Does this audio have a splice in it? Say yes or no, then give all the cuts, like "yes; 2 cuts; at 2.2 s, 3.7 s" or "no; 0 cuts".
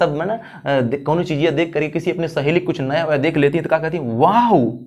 no; 0 cuts